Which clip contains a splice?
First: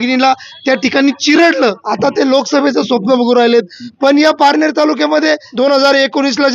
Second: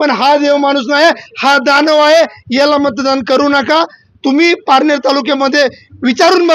first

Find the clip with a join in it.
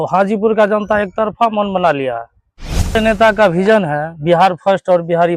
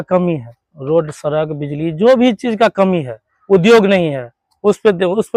first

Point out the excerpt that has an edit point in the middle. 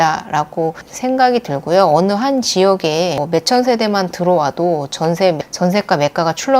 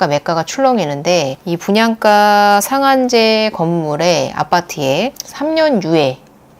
first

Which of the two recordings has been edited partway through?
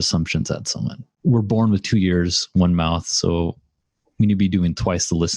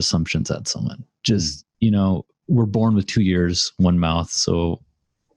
first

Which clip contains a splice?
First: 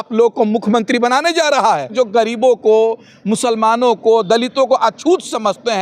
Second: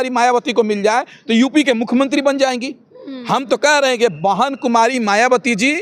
first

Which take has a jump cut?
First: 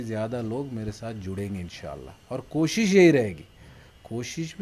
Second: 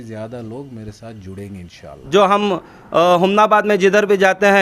second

